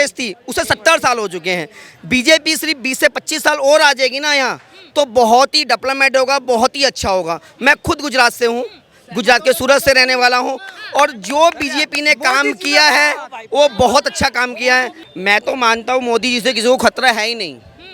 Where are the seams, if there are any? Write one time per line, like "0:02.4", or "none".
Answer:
0:15.0